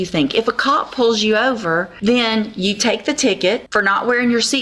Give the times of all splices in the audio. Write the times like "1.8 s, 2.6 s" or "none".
1.9 s, 3.7 s